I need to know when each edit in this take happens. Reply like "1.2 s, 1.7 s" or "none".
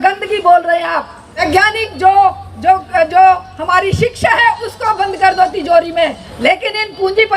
1.3 s, 6.3 s